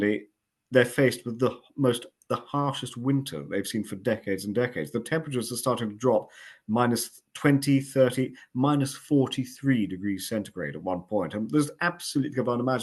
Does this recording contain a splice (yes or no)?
no